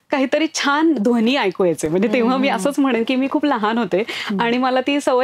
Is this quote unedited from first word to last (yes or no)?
yes